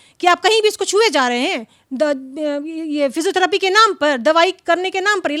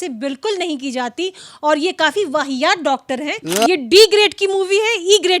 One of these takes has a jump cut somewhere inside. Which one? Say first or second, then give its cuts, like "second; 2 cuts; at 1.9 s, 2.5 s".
second; 1 cut; at 3.5 s